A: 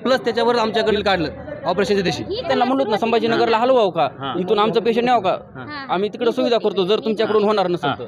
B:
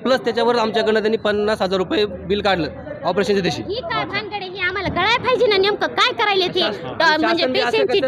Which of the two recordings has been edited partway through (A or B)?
A